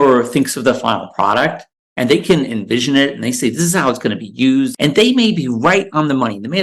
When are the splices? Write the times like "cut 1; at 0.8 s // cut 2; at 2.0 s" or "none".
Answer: cut 1; at 4.7 s

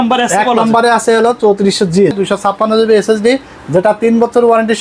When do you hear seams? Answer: cut 1; at 2.1 s

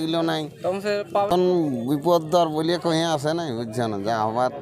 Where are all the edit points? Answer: cut 1; at 1.3 s

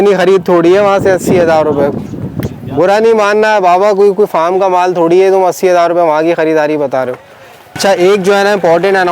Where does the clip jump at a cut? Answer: cut 1; at 7.7 s

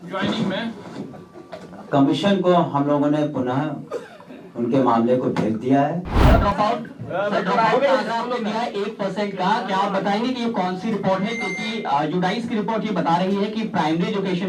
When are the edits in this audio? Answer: cut 1; at 6.1 s

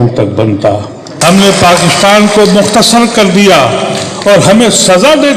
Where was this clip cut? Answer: cut 1; at 1.0 s

